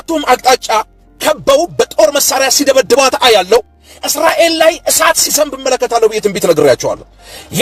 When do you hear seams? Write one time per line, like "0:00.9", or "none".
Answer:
none